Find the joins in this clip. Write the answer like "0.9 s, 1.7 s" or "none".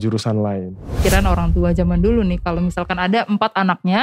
1.0 s